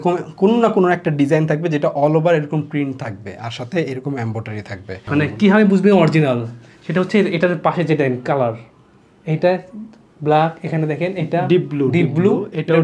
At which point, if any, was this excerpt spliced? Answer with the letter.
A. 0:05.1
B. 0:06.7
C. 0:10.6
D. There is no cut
A